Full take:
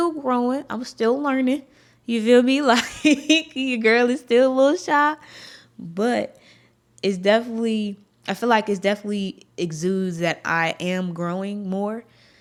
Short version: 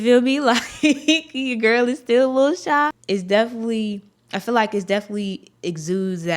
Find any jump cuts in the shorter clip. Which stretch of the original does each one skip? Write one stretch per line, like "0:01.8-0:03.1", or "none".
0:05.2-0:06.9